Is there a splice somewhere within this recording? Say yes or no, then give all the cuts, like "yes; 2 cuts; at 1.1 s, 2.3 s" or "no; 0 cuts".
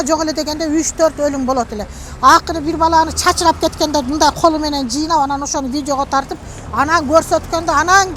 no; 0 cuts